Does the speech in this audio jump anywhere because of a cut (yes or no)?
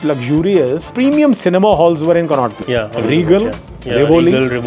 yes